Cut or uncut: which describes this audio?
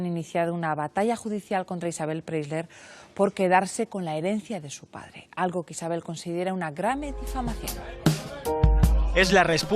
cut